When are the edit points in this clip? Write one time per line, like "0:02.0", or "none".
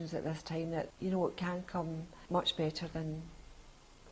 0:00.9
0:02.1